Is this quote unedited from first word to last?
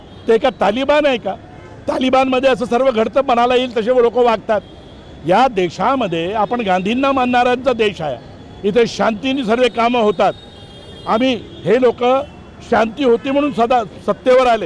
yes; 0 cuts

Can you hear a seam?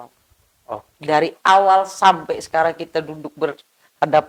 no; 0 cuts

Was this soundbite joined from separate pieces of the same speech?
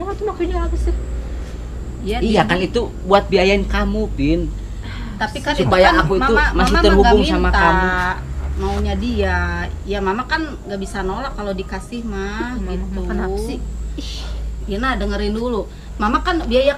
no; 0 cuts

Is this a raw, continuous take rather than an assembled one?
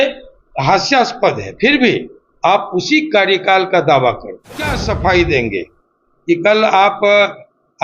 no; 1 cut; at 4.8 s

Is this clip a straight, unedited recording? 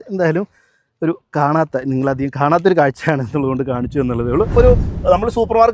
no; 1 cut; at 4.5 s

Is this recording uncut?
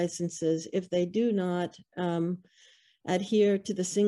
yes; 0 cuts

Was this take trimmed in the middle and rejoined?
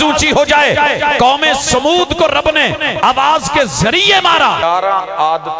yes; 1 cut; at 4.6 s

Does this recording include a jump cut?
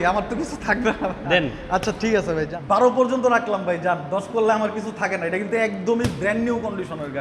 yes; 1 cut; at 2.5 s

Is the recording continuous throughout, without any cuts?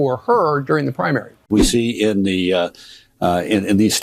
no; 1 cut; at 1.3 s

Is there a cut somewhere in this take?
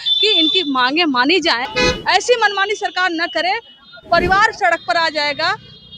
yes; 1 cut; at 1.7 s

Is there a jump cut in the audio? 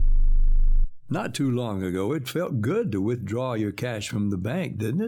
yes; 1 cut; at 0.9 s

